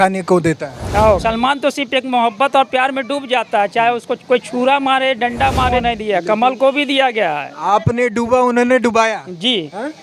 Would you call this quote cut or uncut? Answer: cut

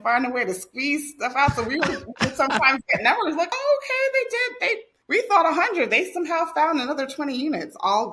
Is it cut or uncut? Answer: cut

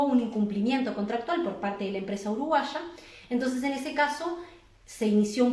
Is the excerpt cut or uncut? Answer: uncut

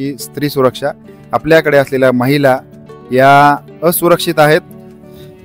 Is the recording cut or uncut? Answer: uncut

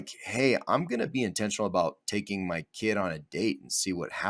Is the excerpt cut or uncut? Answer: uncut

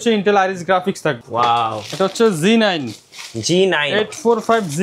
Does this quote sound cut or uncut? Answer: cut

